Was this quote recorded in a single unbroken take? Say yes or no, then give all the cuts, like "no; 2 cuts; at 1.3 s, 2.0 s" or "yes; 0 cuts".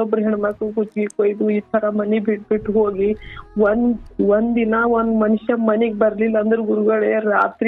yes; 0 cuts